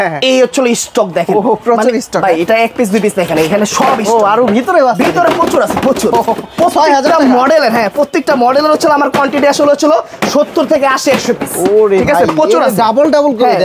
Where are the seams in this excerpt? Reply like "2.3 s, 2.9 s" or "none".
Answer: none